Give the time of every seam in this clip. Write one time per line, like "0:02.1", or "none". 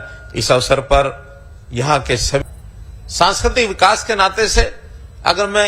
0:02.4